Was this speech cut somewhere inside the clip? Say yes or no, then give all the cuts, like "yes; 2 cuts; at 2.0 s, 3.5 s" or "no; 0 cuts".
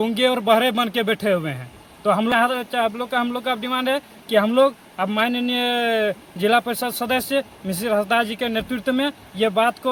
no; 0 cuts